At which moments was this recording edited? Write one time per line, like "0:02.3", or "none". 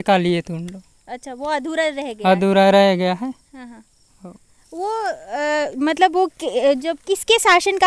none